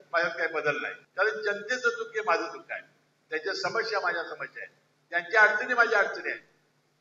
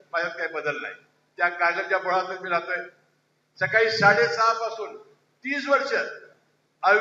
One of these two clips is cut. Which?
first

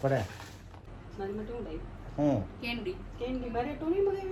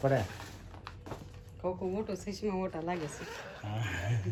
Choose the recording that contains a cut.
first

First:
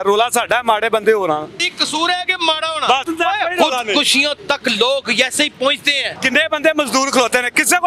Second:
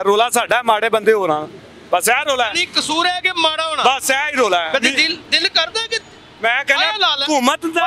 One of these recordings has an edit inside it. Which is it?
first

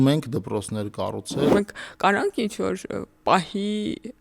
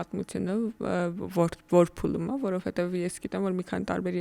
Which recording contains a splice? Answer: first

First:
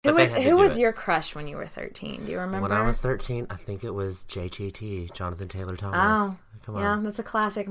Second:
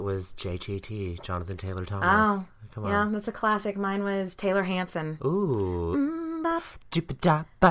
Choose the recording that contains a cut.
second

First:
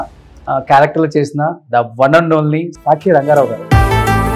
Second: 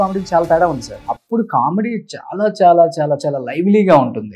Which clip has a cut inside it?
second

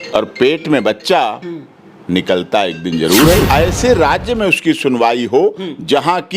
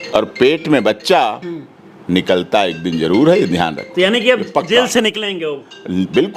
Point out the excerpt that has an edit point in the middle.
first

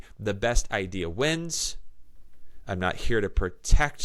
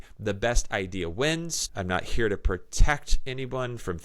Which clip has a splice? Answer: second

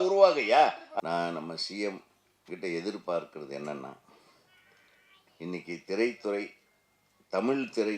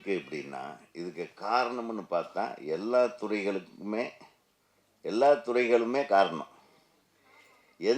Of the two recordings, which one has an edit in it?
first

